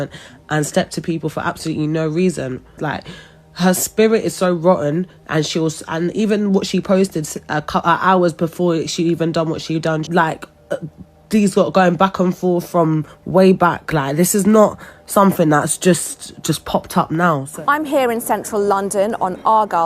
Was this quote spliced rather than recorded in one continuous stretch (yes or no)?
yes